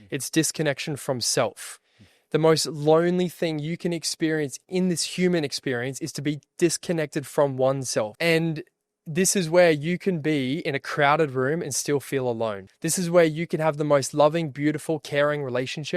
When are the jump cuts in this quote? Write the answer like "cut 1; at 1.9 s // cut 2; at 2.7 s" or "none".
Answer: cut 1; at 8.1 s // cut 2; at 12.7 s